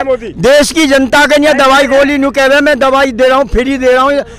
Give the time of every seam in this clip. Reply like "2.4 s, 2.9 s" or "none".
none